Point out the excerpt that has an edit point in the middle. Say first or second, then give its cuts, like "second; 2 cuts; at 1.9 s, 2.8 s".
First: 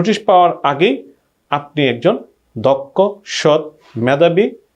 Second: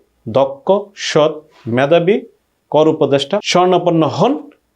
second; 1 cut; at 3.4 s